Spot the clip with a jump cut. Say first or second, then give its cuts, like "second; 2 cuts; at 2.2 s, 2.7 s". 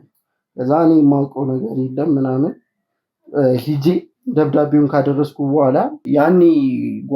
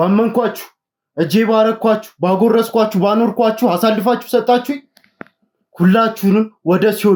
first; 1 cut; at 6.0 s